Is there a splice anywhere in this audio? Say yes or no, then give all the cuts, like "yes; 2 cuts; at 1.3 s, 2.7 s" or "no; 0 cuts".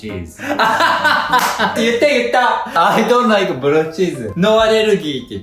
yes; 3 cuts; at 1.7 s, 2.8 s, 4.2 s